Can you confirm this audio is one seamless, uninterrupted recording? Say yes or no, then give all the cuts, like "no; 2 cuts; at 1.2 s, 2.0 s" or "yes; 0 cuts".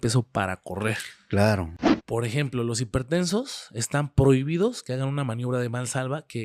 no; 1 cut; at 1.7 s